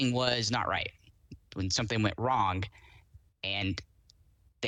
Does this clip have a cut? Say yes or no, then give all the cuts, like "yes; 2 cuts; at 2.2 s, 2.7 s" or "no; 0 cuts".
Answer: no; 0 cuts